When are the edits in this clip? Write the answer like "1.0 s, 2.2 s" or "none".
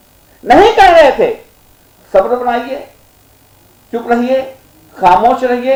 none